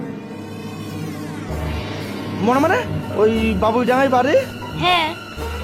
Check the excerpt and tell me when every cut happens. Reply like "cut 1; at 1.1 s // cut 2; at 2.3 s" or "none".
cut 1; at 3.0 s